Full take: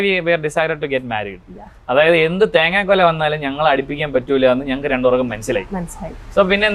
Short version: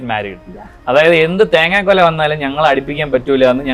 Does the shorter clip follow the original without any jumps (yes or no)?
yes